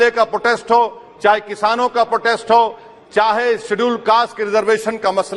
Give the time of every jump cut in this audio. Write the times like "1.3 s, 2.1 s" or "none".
none